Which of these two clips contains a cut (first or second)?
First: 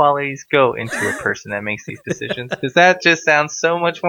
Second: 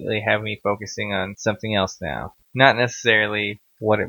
second